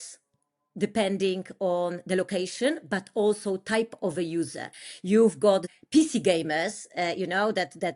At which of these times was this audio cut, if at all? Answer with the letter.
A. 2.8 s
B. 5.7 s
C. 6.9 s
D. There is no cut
B